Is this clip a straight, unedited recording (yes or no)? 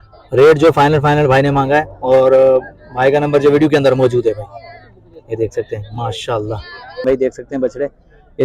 no